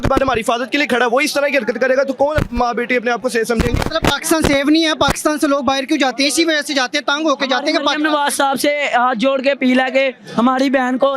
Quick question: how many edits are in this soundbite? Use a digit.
0